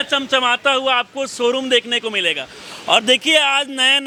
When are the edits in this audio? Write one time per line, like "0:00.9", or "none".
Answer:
none